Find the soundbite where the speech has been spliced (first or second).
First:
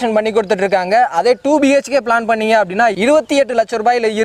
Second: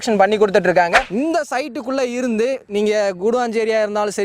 second